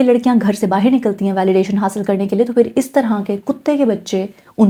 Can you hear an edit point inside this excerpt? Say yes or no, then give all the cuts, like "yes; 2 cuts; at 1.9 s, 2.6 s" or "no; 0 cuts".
no; 0 cuts